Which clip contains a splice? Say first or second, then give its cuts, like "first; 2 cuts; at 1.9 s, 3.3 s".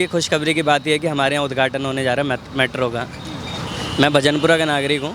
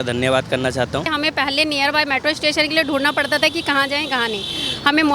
second; 1 cut; at 1.1 s